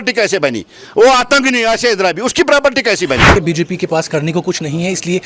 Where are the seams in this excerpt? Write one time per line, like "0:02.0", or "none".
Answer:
0:03.3

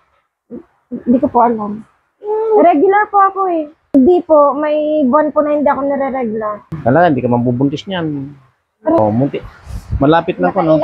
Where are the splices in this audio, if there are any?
0:03.8
0:06.6
0:09.0

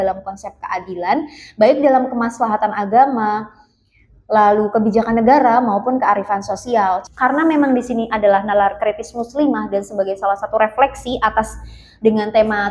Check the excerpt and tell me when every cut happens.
0:07.0

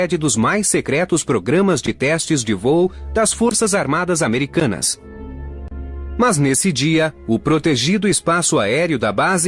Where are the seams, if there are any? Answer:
none

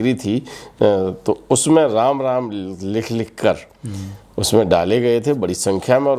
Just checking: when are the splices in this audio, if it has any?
none

